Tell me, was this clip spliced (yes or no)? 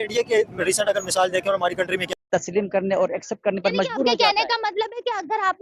yes